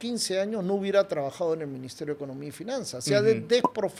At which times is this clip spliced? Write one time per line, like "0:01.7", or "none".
none